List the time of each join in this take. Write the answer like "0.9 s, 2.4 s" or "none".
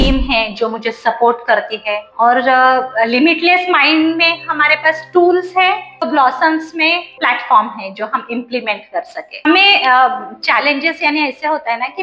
9.3 s